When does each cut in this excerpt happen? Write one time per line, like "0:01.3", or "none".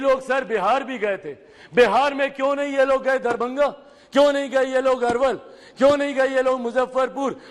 none